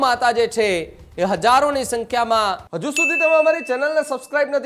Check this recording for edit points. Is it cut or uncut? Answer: cut